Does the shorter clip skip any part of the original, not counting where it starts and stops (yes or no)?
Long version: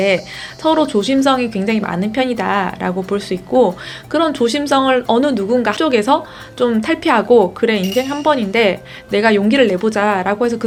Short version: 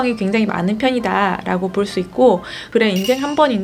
yes